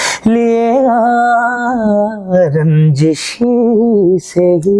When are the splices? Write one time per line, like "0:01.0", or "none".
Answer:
none